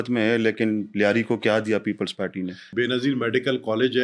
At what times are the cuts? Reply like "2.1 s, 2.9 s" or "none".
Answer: 2.7 s